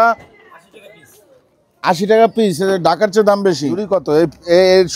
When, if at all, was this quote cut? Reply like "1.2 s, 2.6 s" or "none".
3.8 s